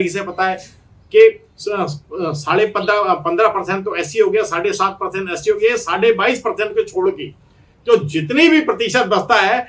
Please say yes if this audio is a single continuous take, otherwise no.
yes